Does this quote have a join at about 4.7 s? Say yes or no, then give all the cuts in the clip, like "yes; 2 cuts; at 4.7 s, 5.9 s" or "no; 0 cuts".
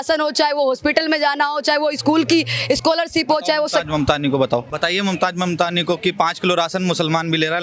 yes; 1 cut; at 4.7 s